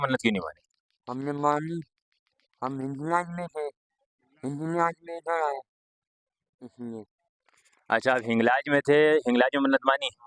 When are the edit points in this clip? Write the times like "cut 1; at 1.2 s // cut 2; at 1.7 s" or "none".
none